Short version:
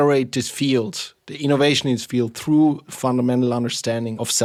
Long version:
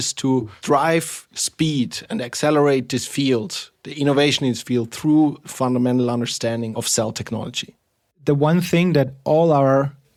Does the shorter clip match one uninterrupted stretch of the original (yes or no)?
yes